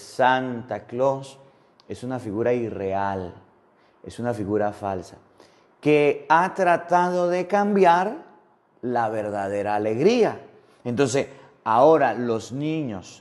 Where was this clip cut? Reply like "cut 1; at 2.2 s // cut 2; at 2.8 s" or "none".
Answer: none